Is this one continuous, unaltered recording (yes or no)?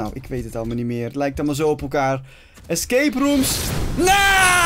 yes